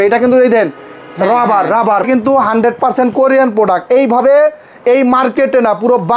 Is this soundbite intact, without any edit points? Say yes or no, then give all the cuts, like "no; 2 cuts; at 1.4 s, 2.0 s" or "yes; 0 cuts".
no; 1 cut; at 2.1 s